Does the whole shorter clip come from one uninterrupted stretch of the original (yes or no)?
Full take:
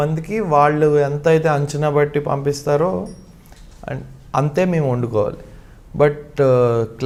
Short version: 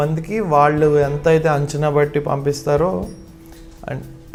yes